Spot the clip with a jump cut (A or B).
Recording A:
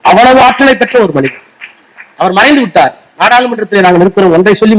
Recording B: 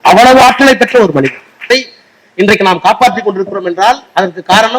B